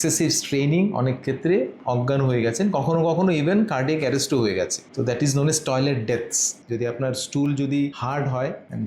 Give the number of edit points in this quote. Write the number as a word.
two